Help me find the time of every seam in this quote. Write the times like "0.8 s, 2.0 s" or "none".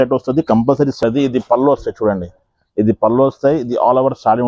1.0 s